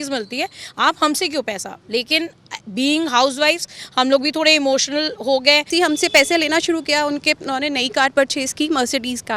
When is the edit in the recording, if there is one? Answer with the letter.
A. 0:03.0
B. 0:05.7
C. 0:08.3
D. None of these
B